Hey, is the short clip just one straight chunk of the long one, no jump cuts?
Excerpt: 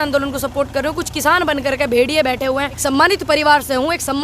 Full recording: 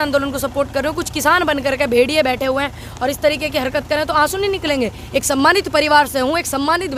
no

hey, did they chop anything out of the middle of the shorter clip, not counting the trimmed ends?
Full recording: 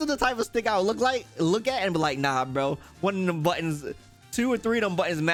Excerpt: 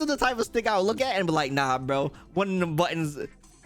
yes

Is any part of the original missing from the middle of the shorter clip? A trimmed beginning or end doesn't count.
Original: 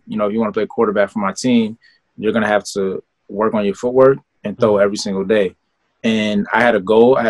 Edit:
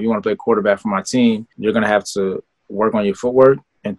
yes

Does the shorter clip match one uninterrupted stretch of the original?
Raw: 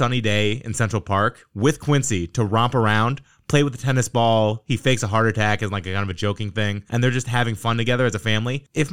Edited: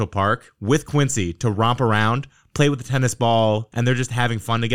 no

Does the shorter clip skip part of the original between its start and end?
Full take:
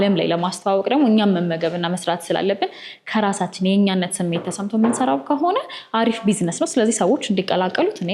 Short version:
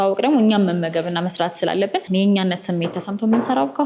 yes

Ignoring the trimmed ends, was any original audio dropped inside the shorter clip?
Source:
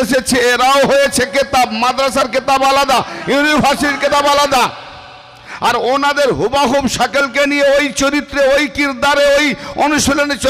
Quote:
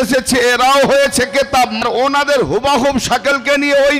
yes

